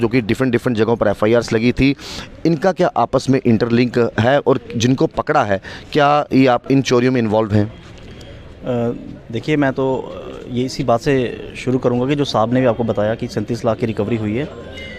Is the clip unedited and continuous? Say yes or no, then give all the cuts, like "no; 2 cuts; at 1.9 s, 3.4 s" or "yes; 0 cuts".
yes; 0 cuts